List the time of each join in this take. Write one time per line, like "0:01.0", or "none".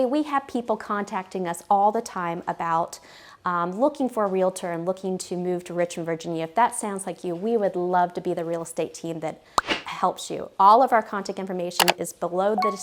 none